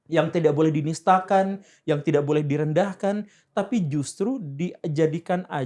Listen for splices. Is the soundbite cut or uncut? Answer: uncut